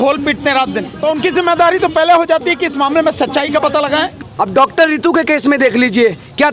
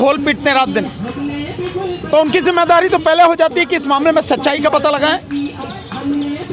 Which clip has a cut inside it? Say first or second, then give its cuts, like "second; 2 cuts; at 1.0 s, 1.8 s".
first; 2 cuts; at 0.9 s, 4.2 s